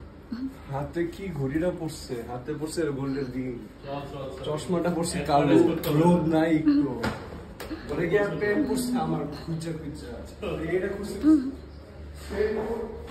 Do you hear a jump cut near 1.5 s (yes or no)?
no